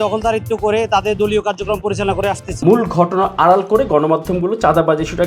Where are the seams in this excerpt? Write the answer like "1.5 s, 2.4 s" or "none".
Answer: 2.6 s